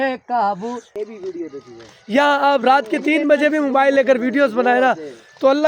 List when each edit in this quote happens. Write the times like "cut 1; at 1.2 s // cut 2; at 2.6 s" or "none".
cut 1; at 1.0 s